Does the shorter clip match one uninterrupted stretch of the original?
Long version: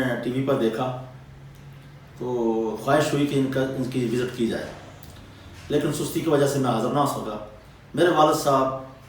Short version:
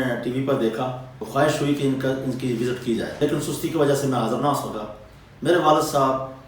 no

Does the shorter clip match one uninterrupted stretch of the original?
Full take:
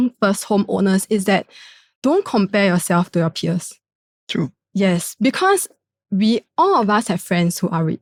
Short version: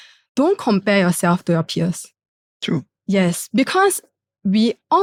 yes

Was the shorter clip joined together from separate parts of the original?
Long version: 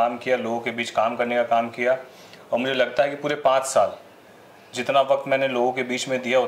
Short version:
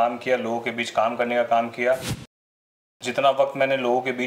yes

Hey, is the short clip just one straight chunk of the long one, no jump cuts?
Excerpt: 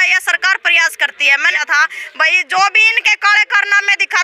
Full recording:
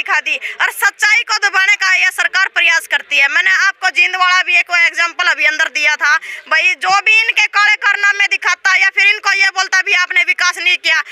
no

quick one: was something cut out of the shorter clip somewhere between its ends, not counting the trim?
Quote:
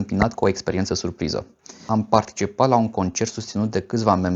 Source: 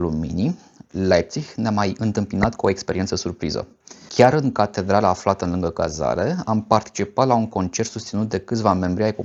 yes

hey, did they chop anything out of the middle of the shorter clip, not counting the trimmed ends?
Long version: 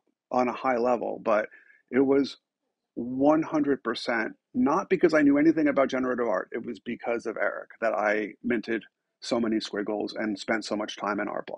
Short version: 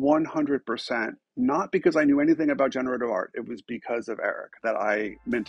no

